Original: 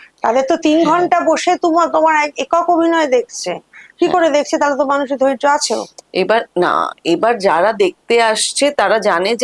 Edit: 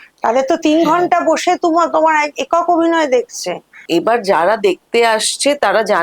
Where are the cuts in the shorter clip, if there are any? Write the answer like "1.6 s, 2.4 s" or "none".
3.8 s